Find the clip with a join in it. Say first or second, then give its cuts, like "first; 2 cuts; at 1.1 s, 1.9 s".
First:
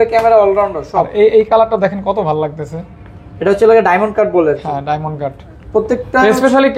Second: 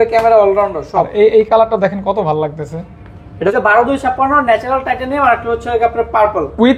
second; 1 cut; at 3.5 s